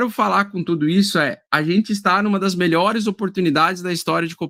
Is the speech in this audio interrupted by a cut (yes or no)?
no